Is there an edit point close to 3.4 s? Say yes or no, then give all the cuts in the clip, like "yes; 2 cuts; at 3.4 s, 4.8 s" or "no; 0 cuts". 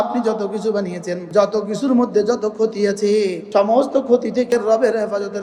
yes; 3 cuts; at 1.1 s, 3.4 s, 4.5 s